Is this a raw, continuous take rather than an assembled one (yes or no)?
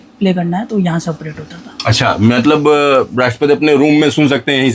yes